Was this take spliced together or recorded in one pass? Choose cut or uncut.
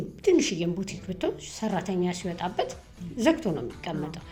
uncut